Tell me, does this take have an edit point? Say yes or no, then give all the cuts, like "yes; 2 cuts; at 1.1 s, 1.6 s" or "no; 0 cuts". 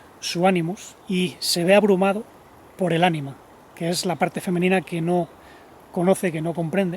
yes; 1 cut; at 0.9 s